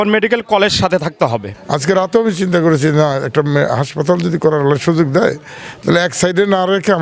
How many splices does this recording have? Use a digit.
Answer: 1